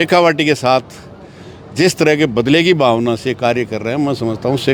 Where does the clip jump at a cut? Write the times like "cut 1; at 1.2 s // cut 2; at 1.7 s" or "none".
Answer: none